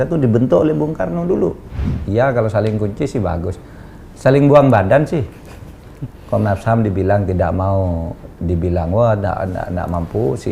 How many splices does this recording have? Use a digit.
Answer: 1